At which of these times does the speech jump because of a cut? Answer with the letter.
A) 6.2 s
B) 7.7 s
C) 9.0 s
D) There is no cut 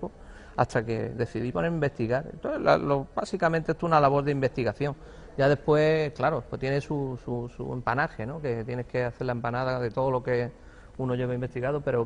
A